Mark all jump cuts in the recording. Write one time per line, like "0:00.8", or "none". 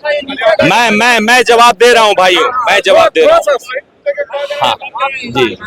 none